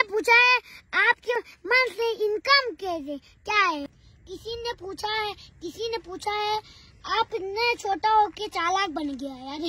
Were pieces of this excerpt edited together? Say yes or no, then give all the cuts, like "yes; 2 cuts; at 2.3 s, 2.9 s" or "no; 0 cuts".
yes; 2 cuts; at 1.3 s, 3.9 s